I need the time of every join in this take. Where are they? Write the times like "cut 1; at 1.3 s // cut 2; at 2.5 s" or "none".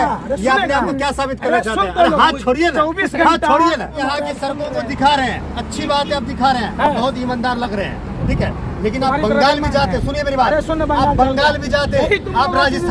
none